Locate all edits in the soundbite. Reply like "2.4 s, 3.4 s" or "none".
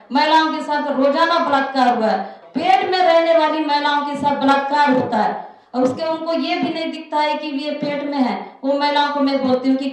2.3 s